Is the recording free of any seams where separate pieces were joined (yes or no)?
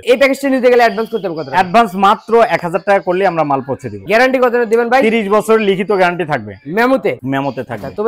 yes